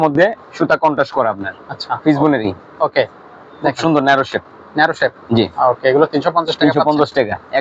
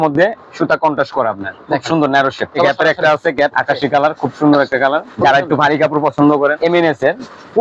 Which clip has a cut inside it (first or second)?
second